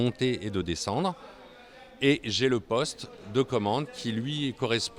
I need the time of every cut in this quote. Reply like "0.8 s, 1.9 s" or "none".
none